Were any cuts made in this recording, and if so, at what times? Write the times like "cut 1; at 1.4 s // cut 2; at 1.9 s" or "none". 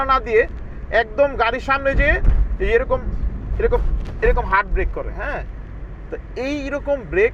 none